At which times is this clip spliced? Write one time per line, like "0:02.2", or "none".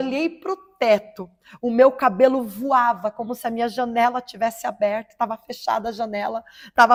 none